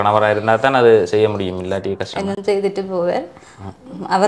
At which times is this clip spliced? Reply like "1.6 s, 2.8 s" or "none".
none

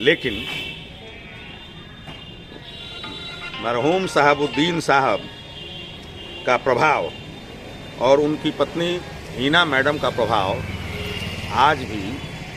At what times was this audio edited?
none

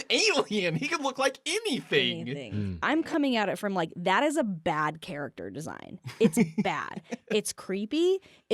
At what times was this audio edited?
2.7 s

